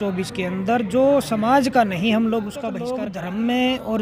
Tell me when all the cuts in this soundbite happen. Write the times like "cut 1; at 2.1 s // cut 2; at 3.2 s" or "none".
cut 1; at 2.9 s